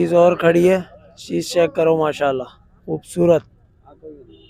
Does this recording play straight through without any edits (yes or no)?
yes